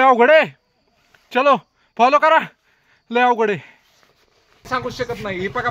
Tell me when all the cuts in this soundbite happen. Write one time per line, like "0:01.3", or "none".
0:04.7